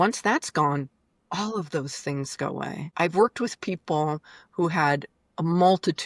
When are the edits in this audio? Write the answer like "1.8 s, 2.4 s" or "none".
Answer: 2.8 s